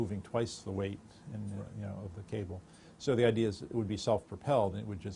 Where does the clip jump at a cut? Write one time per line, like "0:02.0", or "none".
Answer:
0:01.6